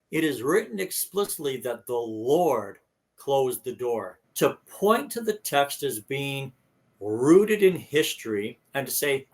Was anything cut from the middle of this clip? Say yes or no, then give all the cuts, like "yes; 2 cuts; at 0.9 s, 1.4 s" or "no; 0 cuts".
yes; 1 cut; at 4.2 s